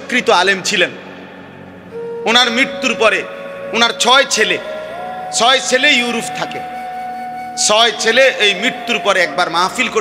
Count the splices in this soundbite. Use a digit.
2